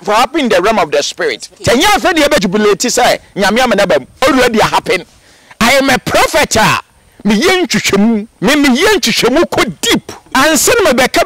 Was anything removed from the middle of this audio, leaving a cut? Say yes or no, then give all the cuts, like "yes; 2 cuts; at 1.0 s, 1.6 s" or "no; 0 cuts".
yes; 5 cuts; at 1.5 s, 2.4 s, 4.2 s, 8.3 s, 10.2 s